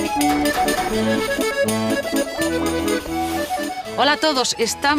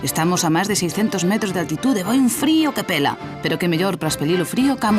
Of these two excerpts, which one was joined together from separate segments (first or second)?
second